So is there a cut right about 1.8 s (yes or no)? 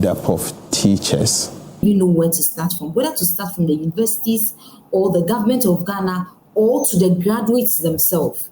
yes